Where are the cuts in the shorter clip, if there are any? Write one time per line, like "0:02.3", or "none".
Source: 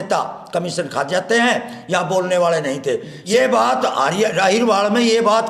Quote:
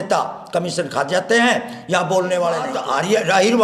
0:02.7